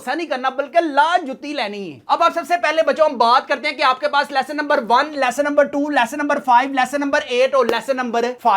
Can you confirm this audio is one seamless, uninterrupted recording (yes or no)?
yes